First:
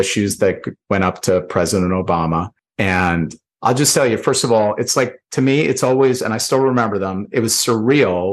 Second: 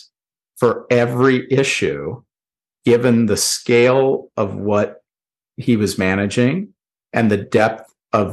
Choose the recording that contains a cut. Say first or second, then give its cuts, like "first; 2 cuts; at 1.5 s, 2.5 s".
first; 2 cuts; at 2.6 s, 3.4 s